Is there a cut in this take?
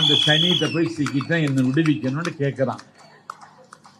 no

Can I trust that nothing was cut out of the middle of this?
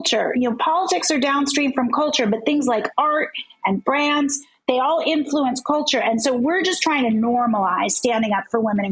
yes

